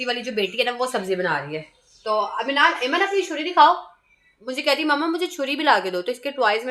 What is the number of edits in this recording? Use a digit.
0